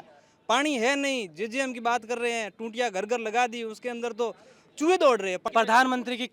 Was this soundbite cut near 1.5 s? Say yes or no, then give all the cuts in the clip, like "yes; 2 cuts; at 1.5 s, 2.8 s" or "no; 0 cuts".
no; 1 cut; at 5.4 s